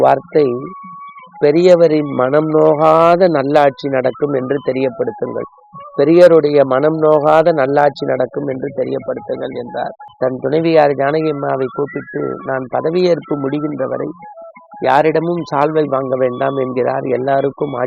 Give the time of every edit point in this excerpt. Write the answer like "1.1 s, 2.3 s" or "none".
10.0 s